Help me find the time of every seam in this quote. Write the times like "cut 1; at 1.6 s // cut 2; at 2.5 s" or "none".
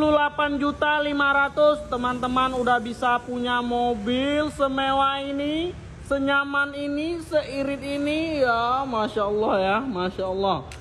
none